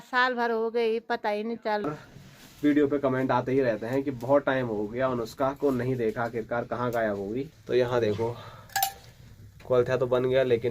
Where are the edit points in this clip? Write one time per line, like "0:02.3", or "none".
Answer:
0:01.9
0:07.5